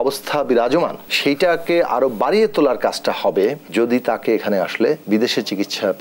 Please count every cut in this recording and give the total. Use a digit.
3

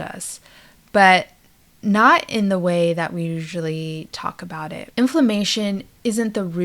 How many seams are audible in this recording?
1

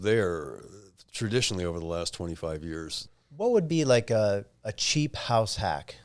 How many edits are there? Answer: 1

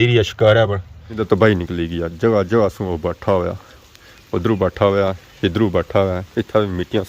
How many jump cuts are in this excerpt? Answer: 1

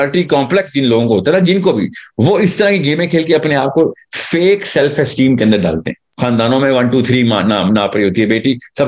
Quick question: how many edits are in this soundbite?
1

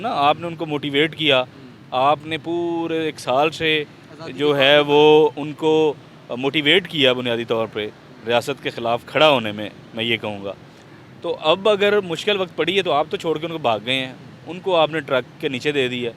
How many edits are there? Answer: 0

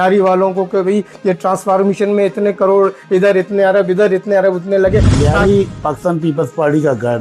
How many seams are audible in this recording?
1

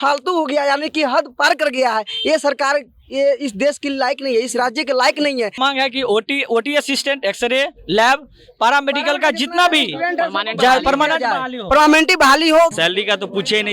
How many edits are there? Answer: 2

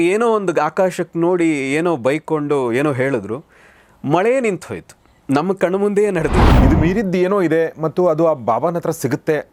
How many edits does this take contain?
1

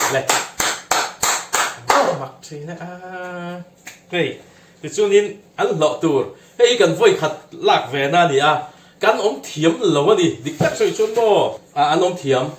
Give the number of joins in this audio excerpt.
1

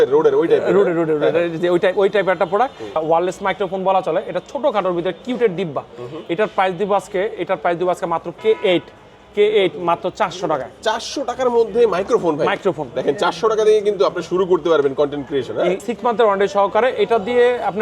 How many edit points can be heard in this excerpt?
3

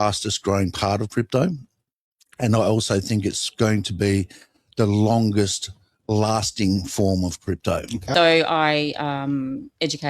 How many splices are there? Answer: 1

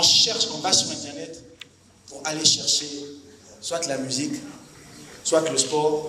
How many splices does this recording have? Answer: 0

